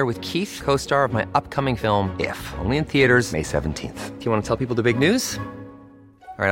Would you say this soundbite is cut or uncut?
uncut